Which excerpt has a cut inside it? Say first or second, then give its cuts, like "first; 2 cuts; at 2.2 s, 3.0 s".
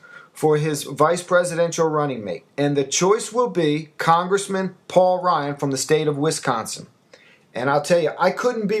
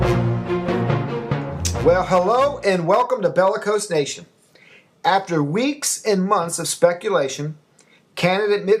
second; 1 cut; at 4.9 s